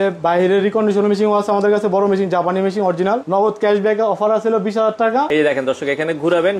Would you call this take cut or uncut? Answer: cut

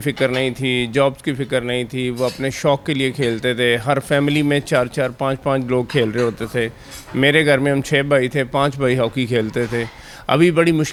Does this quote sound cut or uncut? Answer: uncut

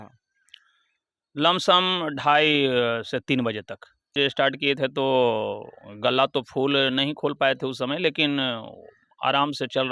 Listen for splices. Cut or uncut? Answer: cut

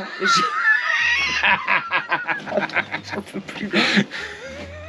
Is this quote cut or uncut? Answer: uncut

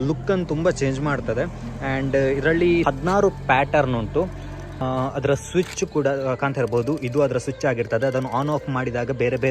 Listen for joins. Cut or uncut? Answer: uncut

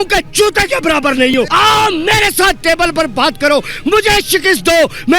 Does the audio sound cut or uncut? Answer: cut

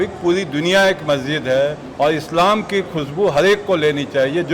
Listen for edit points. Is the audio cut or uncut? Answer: uncut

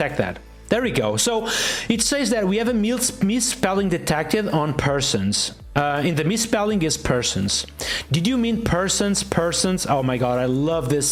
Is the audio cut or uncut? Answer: uncut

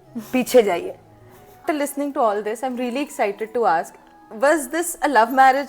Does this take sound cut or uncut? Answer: cut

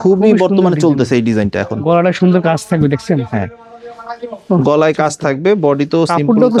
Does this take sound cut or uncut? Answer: uncut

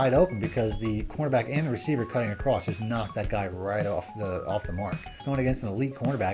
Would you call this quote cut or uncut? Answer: cut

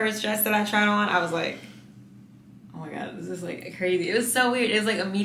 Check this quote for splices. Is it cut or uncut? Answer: uncut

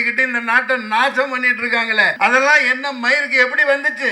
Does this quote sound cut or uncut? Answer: cut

